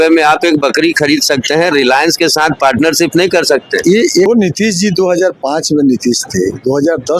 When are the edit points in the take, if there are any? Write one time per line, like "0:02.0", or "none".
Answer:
0:04.3